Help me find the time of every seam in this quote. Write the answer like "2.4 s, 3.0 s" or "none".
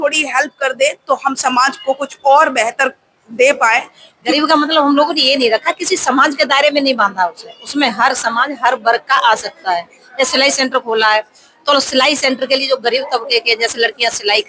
4.2 s